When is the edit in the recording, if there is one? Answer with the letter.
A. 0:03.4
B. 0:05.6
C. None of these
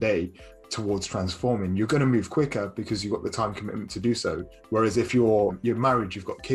B